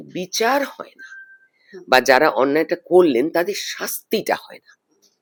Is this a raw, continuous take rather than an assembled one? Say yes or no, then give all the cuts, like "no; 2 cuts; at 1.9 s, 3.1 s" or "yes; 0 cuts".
yes; 0 cuts